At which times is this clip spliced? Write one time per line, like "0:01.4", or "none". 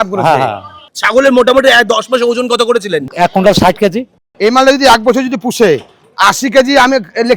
0:00.9
0:03.1
0:04.3

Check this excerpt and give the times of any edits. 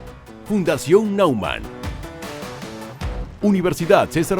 0:03.3

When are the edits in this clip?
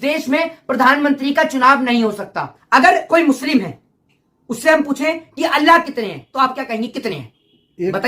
0:02.7

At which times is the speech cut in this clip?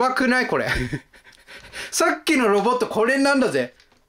none

